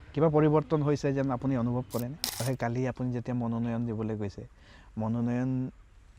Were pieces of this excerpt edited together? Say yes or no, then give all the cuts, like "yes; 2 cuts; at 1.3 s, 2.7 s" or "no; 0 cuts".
yes; 1 cut; at 2.4 s